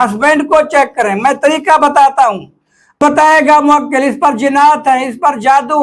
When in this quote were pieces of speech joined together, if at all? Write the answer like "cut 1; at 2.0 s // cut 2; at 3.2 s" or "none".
cut 1; at 3.0 s